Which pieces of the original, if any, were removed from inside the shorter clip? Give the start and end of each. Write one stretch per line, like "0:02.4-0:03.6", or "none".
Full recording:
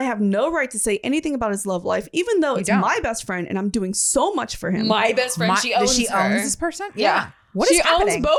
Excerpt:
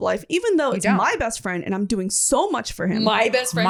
none